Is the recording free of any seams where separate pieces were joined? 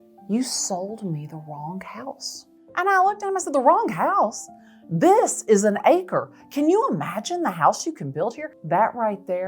no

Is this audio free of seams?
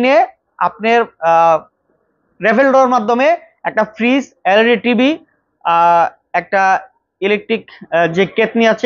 yes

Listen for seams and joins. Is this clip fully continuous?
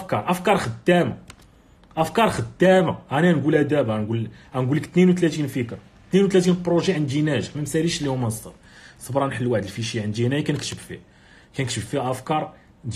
yes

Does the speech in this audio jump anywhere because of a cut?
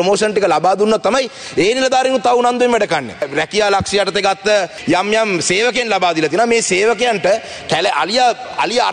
no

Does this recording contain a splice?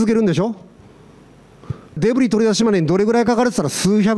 yes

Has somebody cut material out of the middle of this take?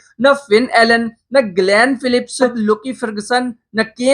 yes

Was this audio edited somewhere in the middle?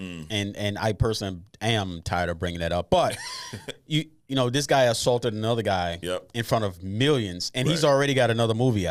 no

